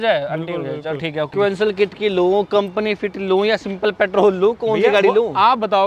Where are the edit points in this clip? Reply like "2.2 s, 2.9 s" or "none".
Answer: 1.3 s